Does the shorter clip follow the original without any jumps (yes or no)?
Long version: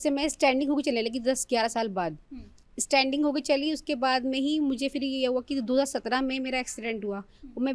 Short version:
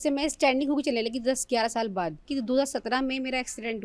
no